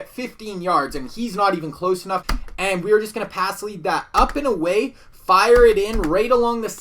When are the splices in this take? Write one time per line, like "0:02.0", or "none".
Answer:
0:02.2